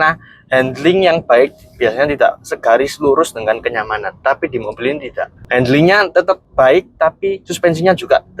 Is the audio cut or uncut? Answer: cut